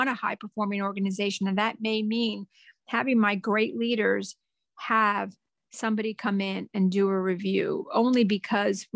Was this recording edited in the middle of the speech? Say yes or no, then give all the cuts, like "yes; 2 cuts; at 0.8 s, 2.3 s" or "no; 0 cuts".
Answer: no; 0 cuts